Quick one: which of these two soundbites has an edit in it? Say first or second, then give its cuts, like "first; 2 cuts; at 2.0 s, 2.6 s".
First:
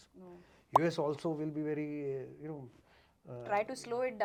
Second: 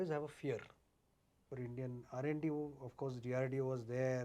second; 1 cut; at 1.4 s